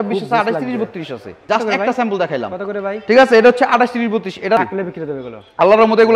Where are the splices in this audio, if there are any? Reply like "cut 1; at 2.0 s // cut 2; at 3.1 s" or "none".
cut 1; at 1.3 s // cut 2; at 4.6 s